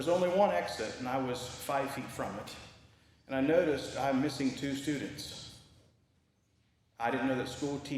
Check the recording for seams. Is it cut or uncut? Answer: cut